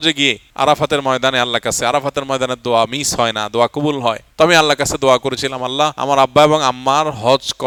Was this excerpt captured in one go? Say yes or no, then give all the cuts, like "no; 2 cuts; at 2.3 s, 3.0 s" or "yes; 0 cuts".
yes; 0 cuts